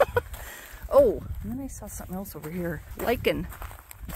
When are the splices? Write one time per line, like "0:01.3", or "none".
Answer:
0:02.9